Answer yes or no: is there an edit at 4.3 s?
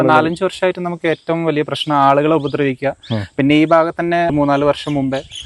yes